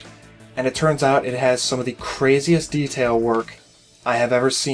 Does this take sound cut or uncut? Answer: uncut